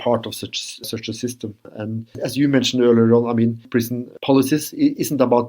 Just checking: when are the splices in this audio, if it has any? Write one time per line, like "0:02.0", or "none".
0:01.7
0:03.7